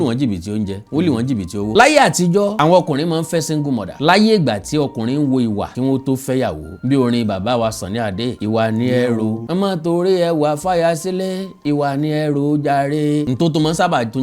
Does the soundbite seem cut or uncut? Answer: cut